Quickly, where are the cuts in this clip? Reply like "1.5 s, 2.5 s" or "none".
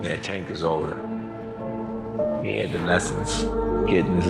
none